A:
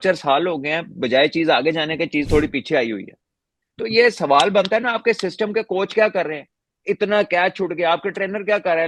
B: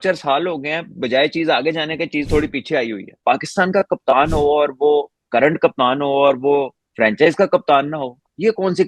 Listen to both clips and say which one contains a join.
B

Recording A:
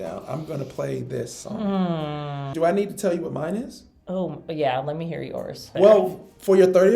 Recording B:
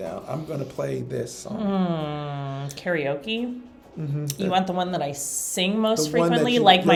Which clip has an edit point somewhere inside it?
A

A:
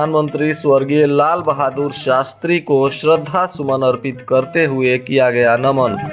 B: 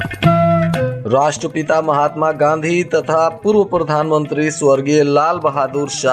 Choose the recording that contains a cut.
B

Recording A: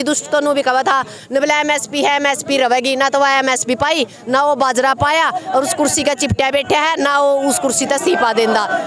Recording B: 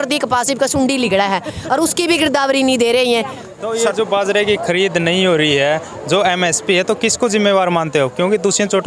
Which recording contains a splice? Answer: B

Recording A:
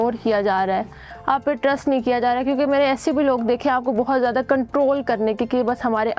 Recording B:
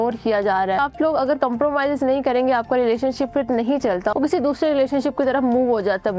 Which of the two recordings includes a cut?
B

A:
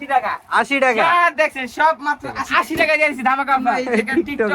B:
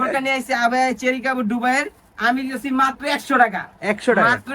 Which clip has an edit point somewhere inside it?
A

